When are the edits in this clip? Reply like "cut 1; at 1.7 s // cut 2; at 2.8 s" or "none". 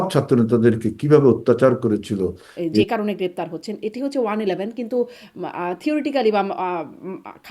cut 1; at 2.8 s